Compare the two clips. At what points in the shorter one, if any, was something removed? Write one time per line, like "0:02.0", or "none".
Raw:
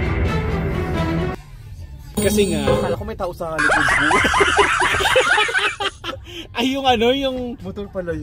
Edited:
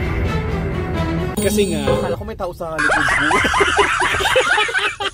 0:01.3